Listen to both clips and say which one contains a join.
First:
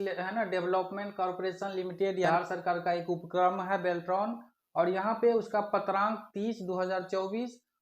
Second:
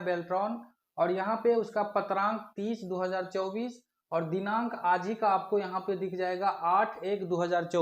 first; 1 cut; at 2.2 s

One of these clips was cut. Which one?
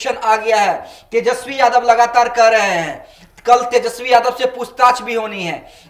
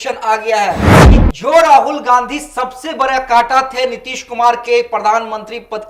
second; 1 cut; at 0.9 s

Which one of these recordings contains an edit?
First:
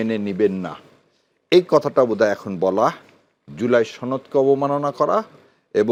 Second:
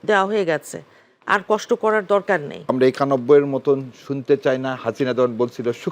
second; 1 cut; at 2.7 s

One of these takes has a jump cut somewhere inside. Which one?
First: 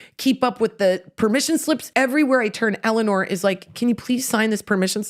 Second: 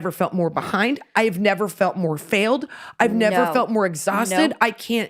first; 1 cut; at 1.9 s

